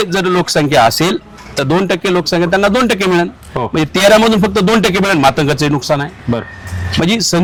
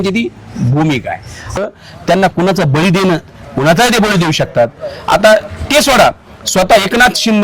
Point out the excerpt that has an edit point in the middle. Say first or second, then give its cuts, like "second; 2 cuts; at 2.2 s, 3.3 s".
second; 1 cut; at 1.6 s